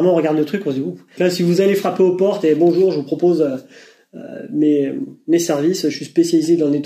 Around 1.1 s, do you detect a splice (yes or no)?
yes